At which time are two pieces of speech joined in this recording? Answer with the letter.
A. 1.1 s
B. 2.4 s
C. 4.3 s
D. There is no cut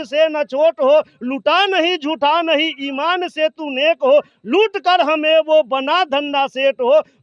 D